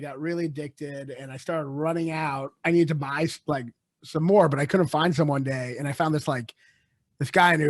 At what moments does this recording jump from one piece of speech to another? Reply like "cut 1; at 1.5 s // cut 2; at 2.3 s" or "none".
cut 1; at 2.6 s